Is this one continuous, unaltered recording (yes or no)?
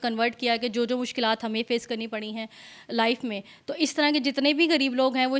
yes